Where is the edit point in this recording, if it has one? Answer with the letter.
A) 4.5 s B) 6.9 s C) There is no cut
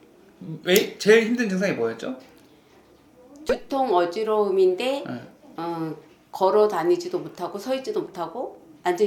C